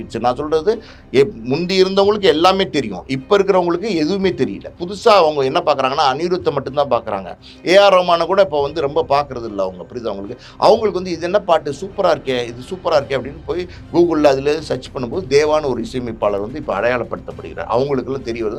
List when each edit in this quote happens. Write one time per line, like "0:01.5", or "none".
none